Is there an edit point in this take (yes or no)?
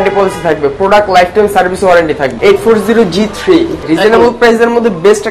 yes